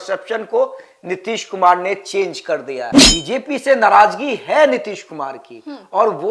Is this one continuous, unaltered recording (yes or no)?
no